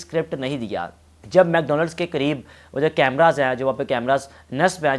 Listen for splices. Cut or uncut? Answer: cut